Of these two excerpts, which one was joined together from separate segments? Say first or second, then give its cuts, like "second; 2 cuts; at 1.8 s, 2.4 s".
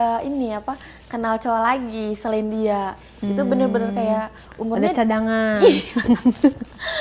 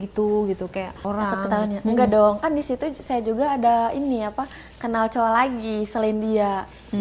second; 1 cut; at 1.0 s